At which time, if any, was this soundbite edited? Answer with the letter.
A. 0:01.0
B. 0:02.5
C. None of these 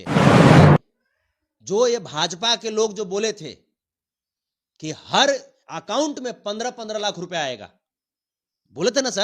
A